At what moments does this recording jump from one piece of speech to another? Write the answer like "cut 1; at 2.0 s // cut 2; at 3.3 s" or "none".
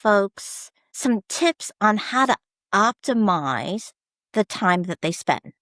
cut 1; at 0.9 s